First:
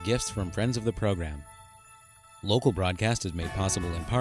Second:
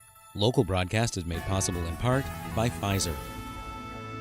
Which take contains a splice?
second; 1 cut; at 3.2 s

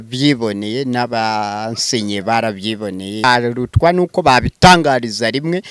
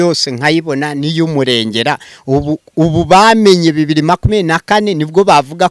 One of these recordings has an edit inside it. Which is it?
first; 1 cut; at 3.2 s

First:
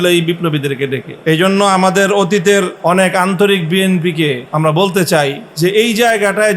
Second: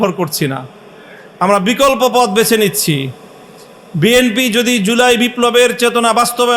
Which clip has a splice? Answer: first; 4 cuts; at 1.1 s, 2.7 s, 4.4 s, 5.4 s

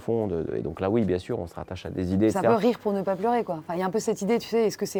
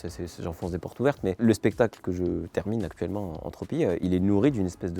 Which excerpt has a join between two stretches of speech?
second; 2 cuts; at 1.4 s, 4.0 s

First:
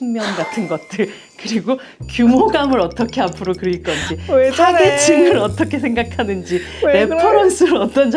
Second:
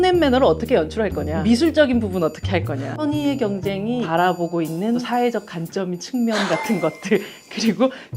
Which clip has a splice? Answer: second; 4 cuts; at 1.3 s, 2.8 s, 4.1 s, 5.1 s

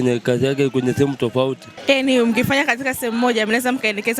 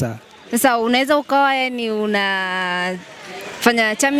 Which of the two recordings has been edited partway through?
first; 1 cut; at 1.7 s

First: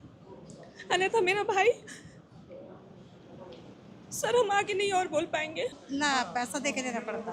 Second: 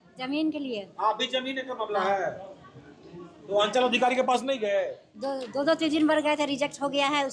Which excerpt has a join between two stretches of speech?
first; 1 cut; at 5.8 s

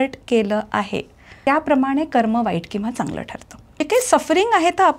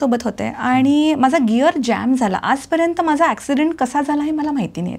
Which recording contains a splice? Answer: first; 2 cuts; at 1.2 s, 3.9 s

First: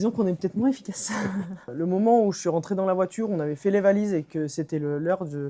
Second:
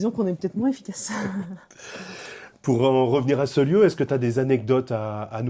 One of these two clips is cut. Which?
first; 1 cut; at 1.7 s

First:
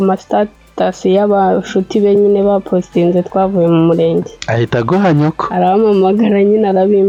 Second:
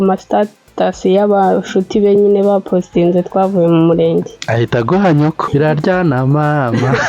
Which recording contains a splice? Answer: second; 1 cut; at 5.5 s

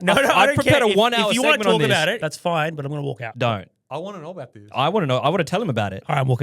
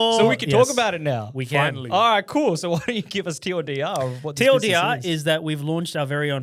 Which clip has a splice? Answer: first; 2 cuts; at 2.2 s, 3.3 s

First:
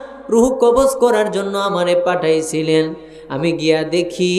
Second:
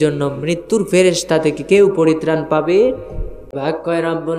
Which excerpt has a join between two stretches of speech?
second; 1 cut; at 3.5 s

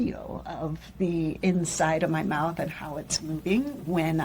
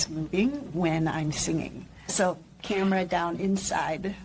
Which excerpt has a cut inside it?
second; 1 cut; at 2.1 s

